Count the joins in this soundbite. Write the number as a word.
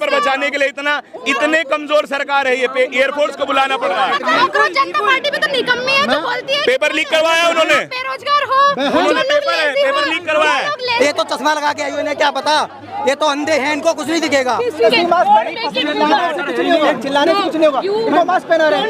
three